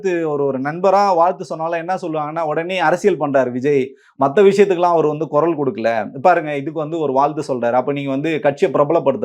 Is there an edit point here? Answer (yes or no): no